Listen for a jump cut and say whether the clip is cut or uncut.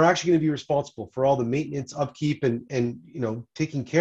uncut